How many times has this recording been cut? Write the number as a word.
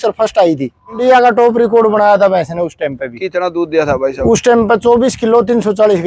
one